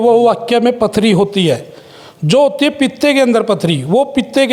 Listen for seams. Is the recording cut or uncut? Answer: uncut